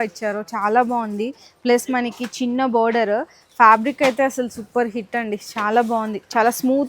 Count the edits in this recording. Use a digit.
0